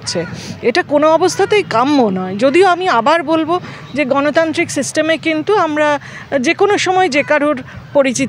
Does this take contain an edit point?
no; 0 cuts

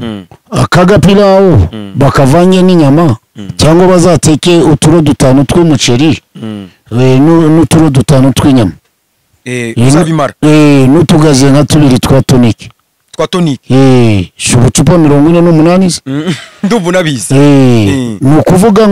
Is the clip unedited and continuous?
yes; 0 cuts

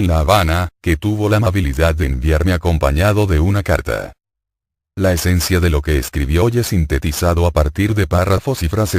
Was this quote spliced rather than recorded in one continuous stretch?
yes; 1 cut; at 1.2 s

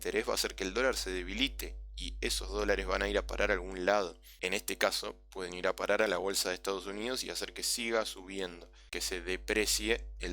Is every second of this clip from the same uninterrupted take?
no; 2 cuts; at 4.3 s, 8.9 s

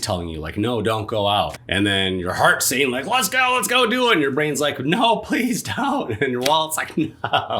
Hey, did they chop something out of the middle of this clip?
yes; 1 cut; at 1.6 s

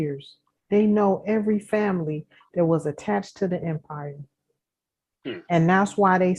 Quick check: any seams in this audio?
no; 0 cuts

